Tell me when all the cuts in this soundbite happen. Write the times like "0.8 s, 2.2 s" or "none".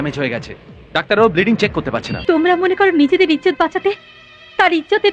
2.1 s